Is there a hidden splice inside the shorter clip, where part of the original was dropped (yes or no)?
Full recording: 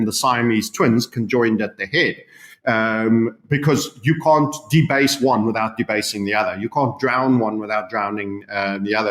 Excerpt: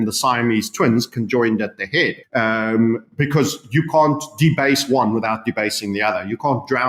yes